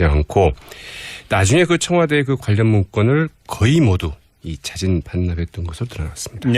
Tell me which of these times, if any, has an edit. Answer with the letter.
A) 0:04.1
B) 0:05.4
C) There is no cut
A